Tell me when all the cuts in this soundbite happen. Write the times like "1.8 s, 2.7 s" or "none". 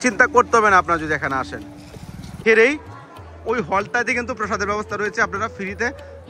2.4 s